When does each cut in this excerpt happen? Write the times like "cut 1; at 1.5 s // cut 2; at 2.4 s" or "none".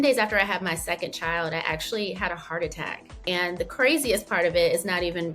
cut 1; at 3.2 s